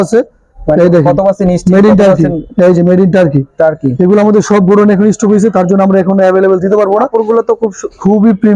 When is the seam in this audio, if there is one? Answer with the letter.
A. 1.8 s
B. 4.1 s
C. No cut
C